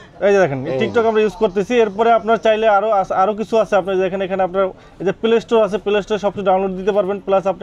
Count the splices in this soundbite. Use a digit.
0